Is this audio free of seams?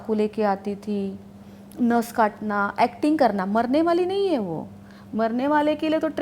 yes; 0 cuts

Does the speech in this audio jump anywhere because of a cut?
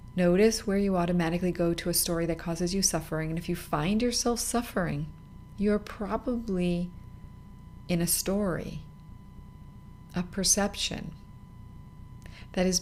no; 0 cuts

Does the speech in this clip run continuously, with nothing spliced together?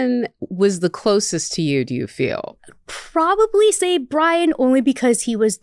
no; 1 cut; at 2.5 s

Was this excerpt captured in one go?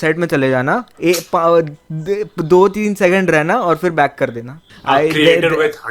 no; 1 cut; at 4.7 s

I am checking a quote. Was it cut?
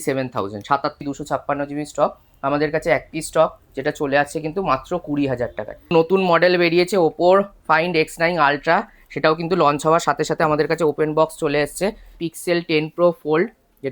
yes; 3 cuts; at 1.0 s, 5.9 s, 12.1 s

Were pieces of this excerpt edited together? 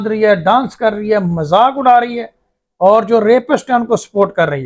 no; 0 cuts

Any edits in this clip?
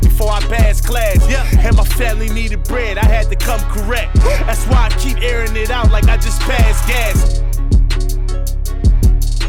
no; 0 cuts

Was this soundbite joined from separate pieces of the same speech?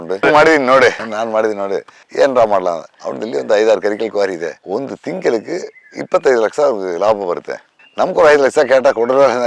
no; 0 cuts

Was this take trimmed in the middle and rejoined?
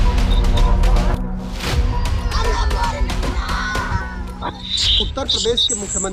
yes; 1 cut; at 1.1 s

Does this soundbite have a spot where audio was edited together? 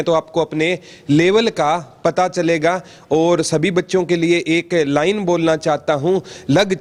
no; 0 cuts

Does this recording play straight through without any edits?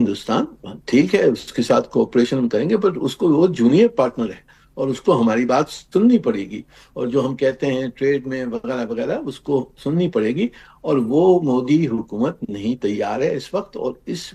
yes; 0 cuts

